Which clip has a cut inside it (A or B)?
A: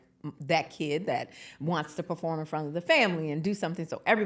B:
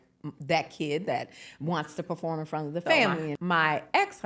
B